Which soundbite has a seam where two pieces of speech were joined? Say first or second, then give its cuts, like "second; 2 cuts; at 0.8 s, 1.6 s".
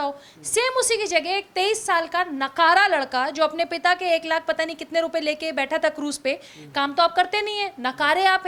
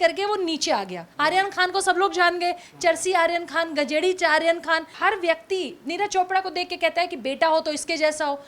second; 2 cuts; at 1.1 s, 4.9 s